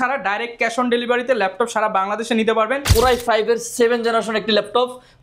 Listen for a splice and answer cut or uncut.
cut